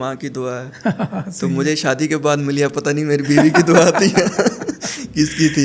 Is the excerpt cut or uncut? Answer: uncut